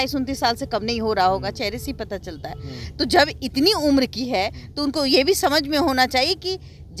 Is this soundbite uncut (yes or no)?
yes